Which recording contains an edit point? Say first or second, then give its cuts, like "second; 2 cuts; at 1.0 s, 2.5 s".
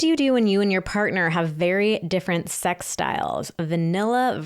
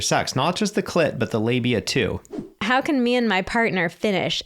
second; 1 cut; at 2.5 s